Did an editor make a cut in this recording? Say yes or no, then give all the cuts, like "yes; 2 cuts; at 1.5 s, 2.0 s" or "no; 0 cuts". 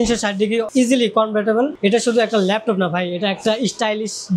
no; 0 cuts